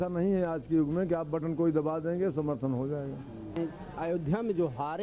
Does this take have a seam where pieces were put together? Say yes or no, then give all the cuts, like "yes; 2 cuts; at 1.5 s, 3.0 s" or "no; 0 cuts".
yes; 1 cut; at 3.5 s